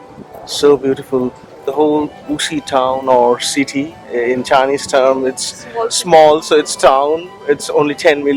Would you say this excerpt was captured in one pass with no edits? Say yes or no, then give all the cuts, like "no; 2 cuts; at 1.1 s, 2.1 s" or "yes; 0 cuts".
yes; 0 cuts